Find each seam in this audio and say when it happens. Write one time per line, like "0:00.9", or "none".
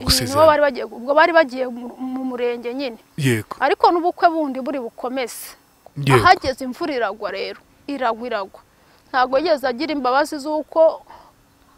0:05.8